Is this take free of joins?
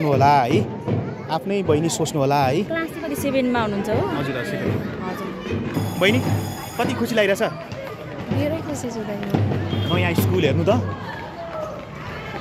yes; 0 cuts

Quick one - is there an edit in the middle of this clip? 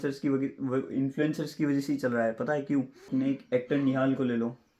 yes; 1 cut; at 3.0 s

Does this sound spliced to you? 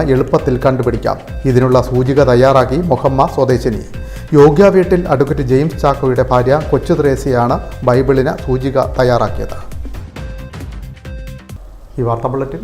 no; 0 cuts

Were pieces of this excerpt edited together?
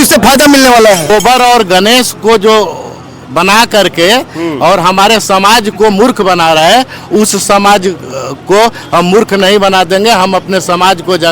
yes; 1 cut; at 1.1 s

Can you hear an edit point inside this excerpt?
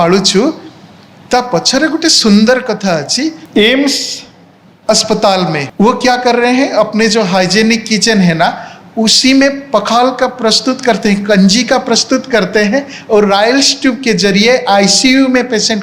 yes; 2 cuts; at 3.4 s, 5.7 s

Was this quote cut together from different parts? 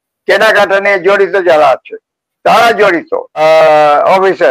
yes; 1 cut; at 3.4 s

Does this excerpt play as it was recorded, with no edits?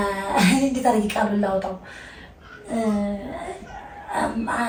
yes; 0 cuts

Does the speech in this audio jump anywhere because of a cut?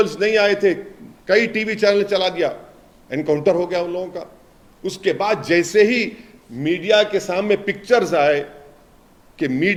no; 0 cuts

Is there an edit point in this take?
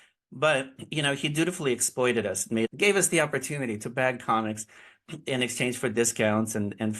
yes; 1 cut; at 2.7 s

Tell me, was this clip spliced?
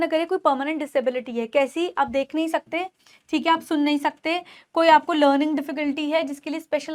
no; 0 cuts

